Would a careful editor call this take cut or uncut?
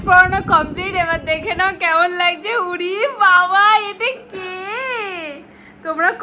uncut